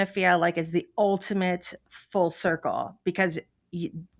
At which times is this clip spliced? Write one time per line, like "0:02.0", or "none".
none